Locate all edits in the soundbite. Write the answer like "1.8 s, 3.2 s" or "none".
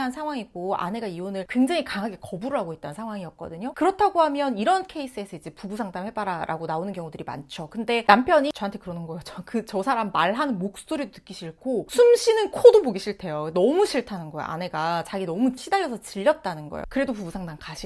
15.6 s, 16.8 s